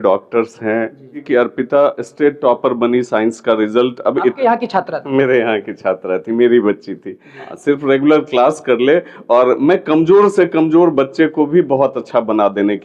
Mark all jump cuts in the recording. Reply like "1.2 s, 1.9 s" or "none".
1.2 s, 7.5 s